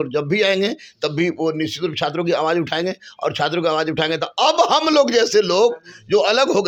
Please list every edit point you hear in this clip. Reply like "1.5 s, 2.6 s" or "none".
none